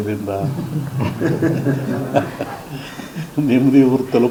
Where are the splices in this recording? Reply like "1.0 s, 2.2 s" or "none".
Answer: none